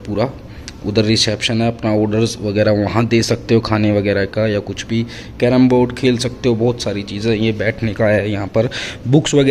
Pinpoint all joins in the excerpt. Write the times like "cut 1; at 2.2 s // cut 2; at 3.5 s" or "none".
none